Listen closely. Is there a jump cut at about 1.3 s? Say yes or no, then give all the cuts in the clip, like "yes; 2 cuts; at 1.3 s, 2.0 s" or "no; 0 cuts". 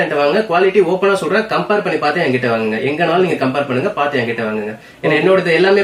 no; 0 cuts